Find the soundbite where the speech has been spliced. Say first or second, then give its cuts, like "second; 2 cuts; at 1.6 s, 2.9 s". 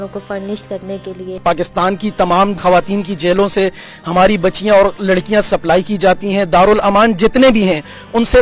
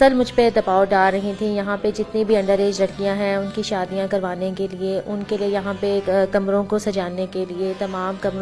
first; 2 cuts; at 1.4 s, 2.6 s